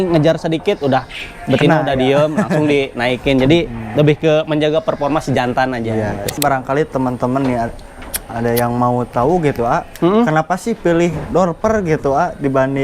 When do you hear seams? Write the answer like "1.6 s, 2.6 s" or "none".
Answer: 6.4 s